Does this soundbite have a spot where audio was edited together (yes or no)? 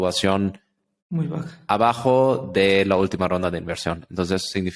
no